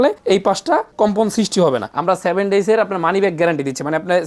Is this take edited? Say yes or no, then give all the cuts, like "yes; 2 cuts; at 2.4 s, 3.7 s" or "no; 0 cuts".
yes; 1 cut; at 1.9 s